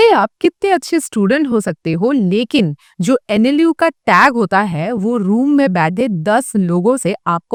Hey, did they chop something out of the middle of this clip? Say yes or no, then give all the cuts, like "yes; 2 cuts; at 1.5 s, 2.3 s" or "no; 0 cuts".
no; 0 cuts